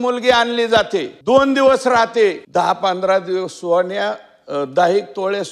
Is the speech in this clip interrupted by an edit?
yes; 2 cuts; at 1.1 s, 2.4 s

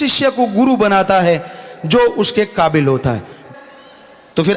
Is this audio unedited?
no; 1 cut; at 3.3 s

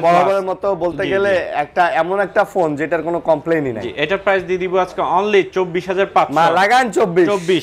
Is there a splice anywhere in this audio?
no; 0 cuts

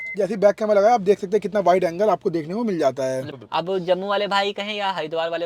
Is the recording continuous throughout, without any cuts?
no; 1 cut; at 3.4 s

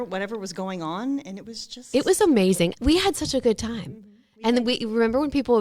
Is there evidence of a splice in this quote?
yes; 1 cut; at 2.7 s

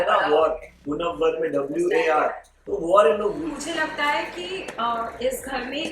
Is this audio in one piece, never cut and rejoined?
no; 1 cut; at 3.5 s

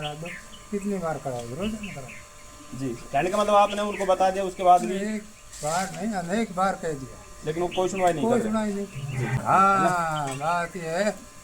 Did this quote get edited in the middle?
yes; 1 cut; at 9.4 s

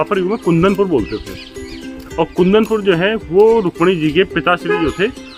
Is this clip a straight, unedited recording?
yes; 0 cuts

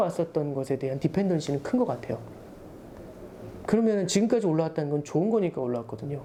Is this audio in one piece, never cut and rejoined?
yes; 0 cuts

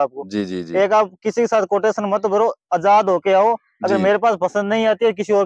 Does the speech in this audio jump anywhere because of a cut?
no; 0 cuts

